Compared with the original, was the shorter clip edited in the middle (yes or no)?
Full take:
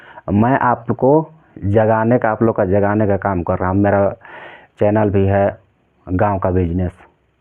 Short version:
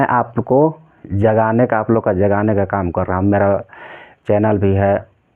no